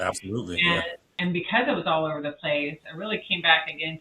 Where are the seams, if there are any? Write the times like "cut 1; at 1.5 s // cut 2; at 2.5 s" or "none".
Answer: cut 1; at 1.1 s